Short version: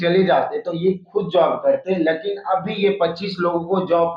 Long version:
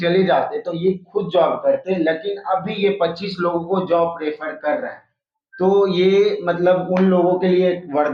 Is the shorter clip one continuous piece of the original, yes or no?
yes